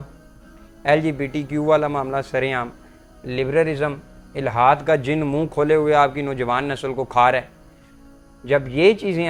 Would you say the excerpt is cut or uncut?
uncut